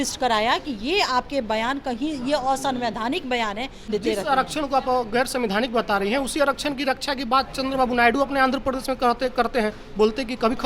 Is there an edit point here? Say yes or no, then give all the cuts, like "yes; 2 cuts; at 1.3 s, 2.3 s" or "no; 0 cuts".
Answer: yes; 1 cut; at 3.9 s